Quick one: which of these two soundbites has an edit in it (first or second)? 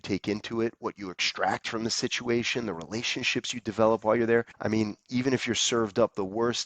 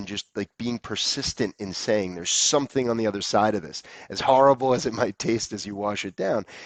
first